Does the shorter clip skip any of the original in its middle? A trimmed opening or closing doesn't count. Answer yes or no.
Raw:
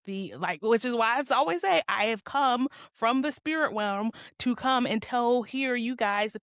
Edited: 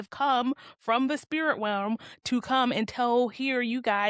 no